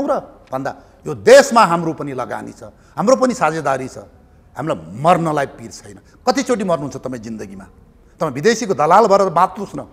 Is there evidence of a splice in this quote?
no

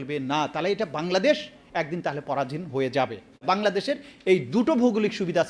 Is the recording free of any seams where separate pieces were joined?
no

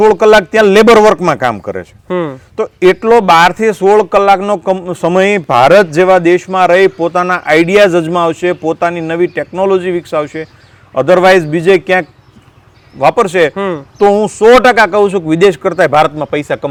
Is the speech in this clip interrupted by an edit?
no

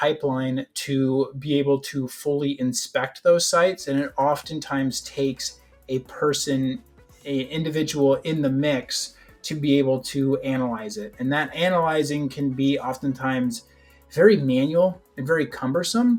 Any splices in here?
no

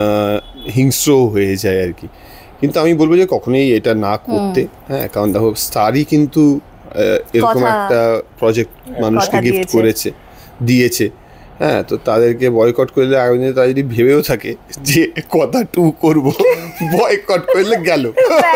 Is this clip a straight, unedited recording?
yes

